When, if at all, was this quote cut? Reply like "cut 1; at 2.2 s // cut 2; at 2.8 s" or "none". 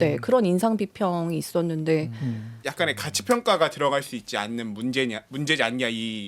cut 1; at 2.6 s